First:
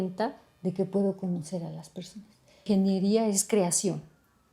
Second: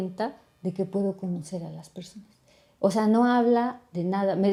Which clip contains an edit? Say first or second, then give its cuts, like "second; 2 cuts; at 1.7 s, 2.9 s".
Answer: first; 1 cut; at 2.7 s